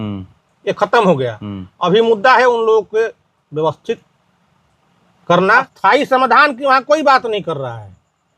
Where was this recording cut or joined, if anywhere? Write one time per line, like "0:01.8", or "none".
0:05.7